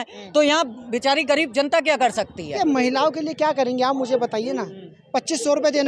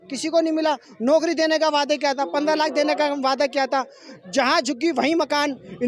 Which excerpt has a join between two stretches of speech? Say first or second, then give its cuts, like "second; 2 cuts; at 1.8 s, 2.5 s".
first; 1 cut; at 2.5 s